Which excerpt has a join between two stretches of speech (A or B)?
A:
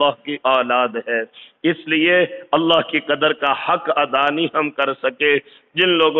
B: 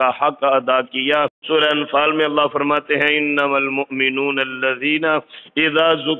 B